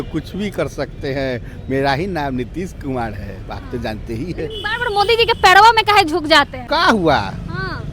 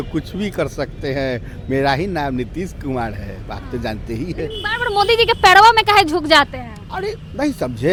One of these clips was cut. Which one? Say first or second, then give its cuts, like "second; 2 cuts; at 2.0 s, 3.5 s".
first; 1 cut; at 6.6 s